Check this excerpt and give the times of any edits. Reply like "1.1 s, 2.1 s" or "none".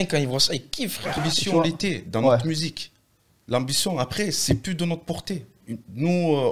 1.2 s

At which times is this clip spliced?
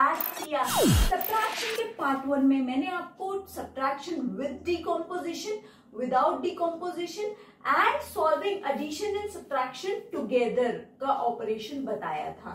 0.9 s

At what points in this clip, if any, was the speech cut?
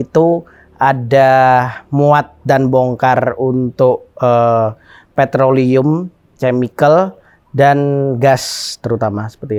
none

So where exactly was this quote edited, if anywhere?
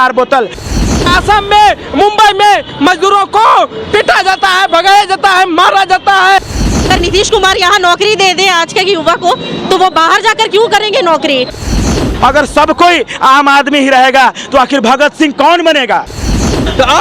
0.7 s, 6.5 s, 11.7 s, 16.3 s

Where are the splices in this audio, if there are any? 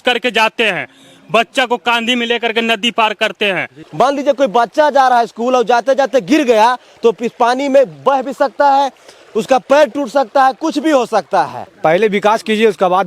3.8 s, 11.6 s

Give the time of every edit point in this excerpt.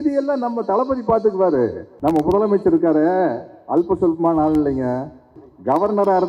1.8 s, 5.4 s

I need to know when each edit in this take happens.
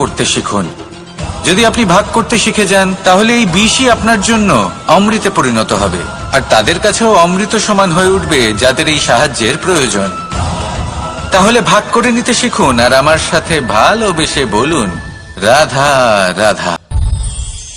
16.8 s

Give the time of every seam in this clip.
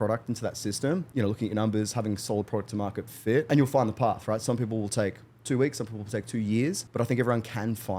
1.1 s, 3.5 s, 6.8 s

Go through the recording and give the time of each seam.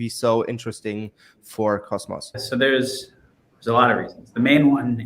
2.4 s

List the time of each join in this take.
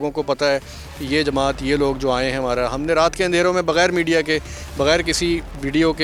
none

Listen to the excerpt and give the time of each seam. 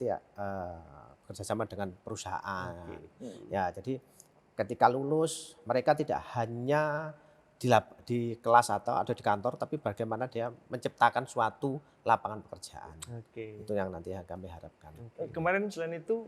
none

